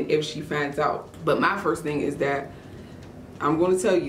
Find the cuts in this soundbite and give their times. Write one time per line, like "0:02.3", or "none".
0:01.1